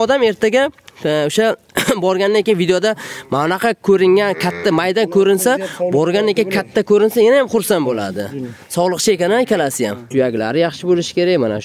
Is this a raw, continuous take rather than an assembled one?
no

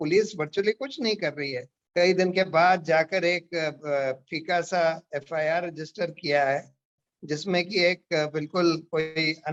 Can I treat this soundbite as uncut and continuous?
yes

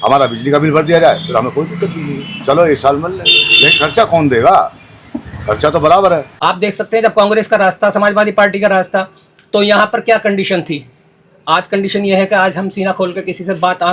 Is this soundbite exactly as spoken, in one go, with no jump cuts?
no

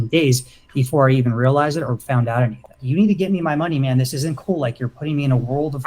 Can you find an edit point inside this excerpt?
yes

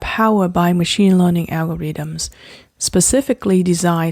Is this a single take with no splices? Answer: yes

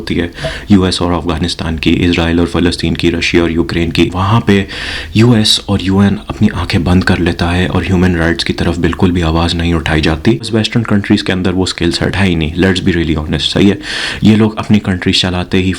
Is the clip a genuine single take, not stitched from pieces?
no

